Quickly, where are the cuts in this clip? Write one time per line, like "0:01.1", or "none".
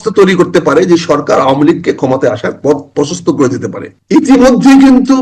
0:03.9